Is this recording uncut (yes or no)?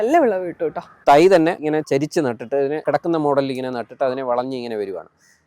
no